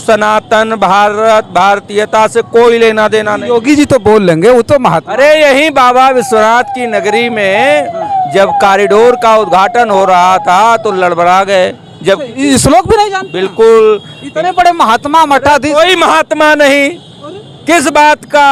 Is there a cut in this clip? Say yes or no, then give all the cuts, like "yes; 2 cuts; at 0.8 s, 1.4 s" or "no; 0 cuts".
no; 0 cuts